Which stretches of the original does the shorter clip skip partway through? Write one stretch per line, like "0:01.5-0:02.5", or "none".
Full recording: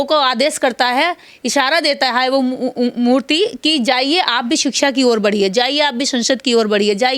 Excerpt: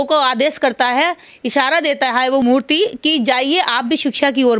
0:02.4-0:03.0